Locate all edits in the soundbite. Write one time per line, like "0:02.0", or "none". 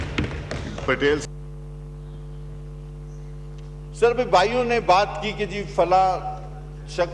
0:01.2